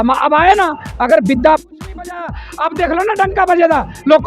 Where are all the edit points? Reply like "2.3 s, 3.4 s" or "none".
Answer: 1.6 s